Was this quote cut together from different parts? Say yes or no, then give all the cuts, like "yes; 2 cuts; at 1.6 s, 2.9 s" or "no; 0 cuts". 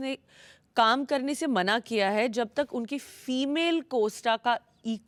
no; 0 cuts